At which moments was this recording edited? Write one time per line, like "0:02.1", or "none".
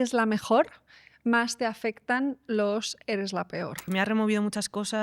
0:03.9